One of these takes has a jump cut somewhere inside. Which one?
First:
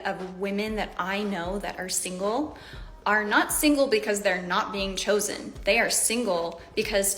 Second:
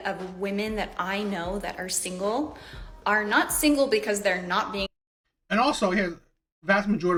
first; 1 cut; at 4.9 s

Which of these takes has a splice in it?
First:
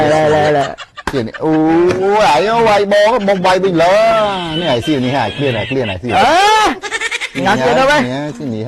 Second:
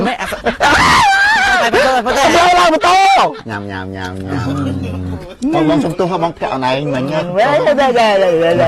second; 1 cut; at 3.4 s

